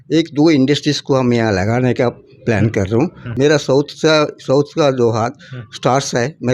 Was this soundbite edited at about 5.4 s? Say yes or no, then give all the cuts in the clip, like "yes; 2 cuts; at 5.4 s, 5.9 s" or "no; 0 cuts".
no; 1 cut; at 3.2 s